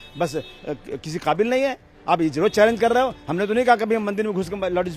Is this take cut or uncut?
uncut